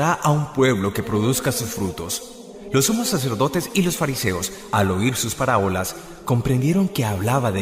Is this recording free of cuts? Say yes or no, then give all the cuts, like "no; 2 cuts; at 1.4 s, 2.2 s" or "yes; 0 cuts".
no; 1 cut; at 2.9 s